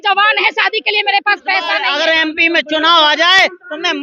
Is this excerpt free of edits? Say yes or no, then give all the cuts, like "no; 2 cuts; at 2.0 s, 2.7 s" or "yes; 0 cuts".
no; 1 cut; at 1.8 s